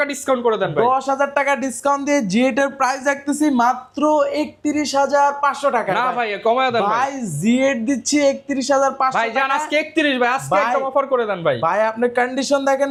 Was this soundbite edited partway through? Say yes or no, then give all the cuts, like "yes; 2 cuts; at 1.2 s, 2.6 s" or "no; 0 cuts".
no; 0 cuts